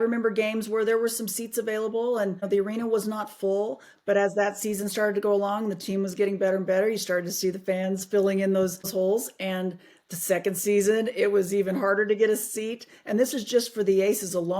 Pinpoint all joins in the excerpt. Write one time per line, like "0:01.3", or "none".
0:02.4
0:08.9